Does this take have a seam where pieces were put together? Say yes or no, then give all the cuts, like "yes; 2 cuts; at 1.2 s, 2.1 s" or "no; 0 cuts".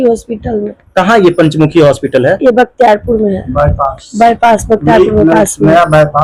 no; 0 cuts